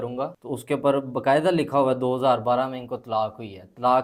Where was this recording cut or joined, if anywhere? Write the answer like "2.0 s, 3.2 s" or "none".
none